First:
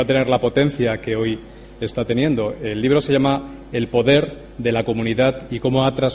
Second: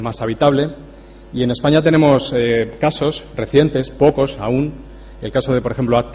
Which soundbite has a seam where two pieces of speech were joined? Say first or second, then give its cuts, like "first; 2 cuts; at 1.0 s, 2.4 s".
second; 1 cut; at 5.1 s